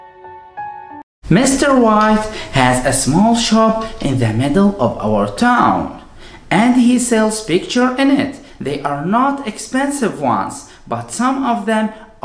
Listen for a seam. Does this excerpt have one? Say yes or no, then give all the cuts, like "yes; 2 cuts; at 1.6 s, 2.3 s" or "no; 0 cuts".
yes; 1 cut; at 1.0 s